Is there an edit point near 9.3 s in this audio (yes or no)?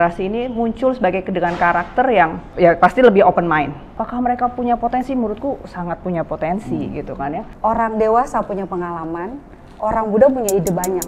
no